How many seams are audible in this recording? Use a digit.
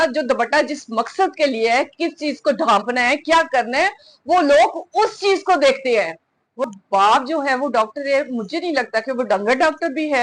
1